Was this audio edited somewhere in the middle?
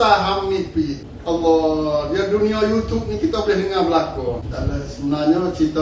yes; 2 cuts; at 1.1 s, 4.5 s

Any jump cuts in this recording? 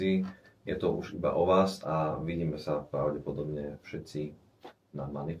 no; 0 cuts

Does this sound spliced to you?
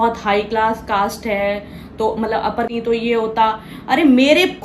yes; 1 cut; at 2.7 s

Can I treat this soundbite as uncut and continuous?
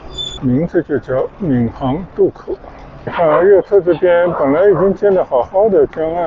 no; 1 cut; at 3.1 s

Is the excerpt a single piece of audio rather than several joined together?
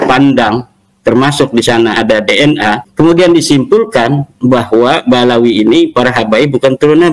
no; 1 cut; at 2.9 s

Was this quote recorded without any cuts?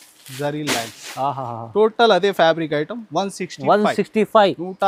yes; 0 cuts

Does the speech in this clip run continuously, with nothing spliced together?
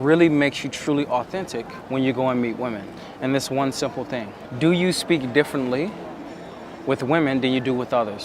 no; 3 cuts; at 1.8 s, 3.0 s, 4.4 s

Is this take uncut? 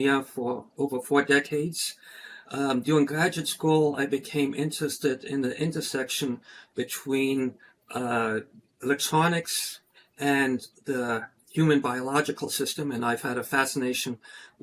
yes; 0 cuts

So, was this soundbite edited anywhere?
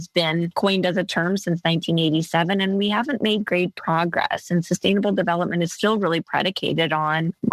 no; 0 cuts

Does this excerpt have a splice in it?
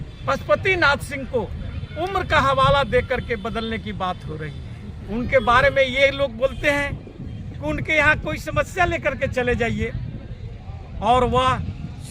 yes; 1 cut; at 5.0 s

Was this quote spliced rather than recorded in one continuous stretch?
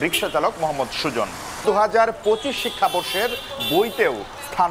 yes; 1 cut; at 1.6 s

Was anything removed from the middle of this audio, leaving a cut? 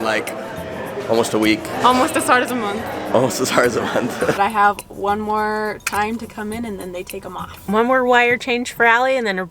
yes; 3 cuts; at 1.7 s, 4.3 s, 7.5 s

